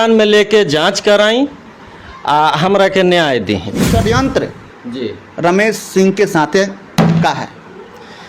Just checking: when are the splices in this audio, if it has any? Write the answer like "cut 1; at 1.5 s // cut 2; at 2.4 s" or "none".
cut 1; at 3.9 s